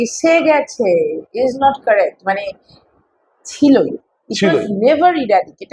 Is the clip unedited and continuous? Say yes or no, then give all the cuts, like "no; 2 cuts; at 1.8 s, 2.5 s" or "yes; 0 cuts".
yes; 0 cuts